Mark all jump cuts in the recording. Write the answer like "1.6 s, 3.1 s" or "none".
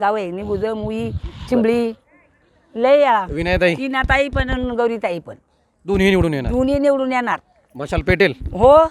none